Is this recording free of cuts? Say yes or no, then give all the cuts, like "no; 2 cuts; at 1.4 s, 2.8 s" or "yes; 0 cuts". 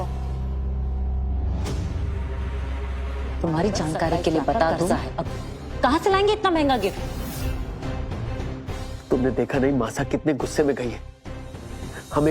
no; 1 cut; at 5.1 s